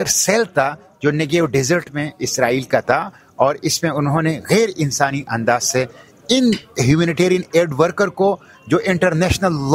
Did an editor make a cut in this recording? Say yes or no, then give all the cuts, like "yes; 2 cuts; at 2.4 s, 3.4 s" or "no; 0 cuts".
no; 0 cuts